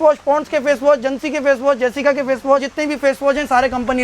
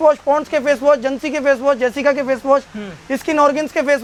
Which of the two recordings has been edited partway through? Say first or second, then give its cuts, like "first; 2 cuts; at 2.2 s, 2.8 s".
first; 1 cut; at 2.7 s